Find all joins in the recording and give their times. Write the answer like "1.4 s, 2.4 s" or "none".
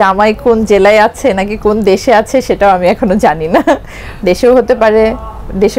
none